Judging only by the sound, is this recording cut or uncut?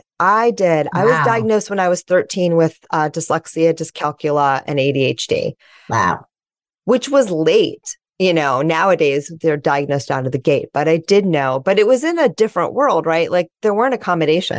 uncut